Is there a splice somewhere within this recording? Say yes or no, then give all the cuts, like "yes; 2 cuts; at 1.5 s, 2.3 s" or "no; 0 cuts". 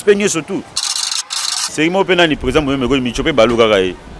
yes; 1 cut; at 1.2 s